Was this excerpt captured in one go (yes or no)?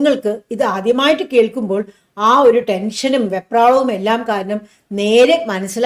yes